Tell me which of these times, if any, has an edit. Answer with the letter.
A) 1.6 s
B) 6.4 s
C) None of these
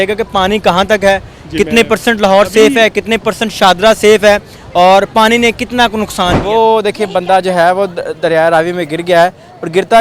B